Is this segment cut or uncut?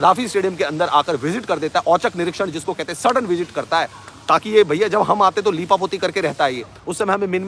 uncut